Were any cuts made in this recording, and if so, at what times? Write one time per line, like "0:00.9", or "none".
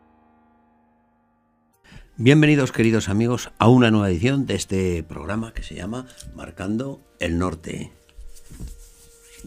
0:00.9